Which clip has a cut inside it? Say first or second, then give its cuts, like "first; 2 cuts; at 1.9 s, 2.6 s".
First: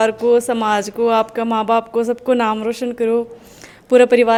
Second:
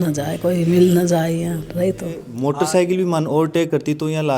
second; 1 cut; at 2.3 s